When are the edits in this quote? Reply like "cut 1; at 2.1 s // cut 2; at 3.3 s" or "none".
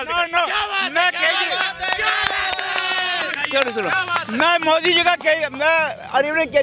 none